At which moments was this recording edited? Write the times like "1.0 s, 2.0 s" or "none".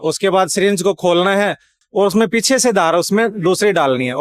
1.8 s